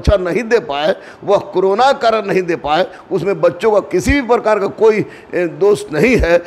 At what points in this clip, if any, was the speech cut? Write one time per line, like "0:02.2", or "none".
none